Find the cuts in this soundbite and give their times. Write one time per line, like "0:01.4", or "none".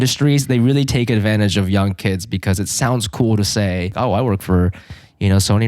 0:03.9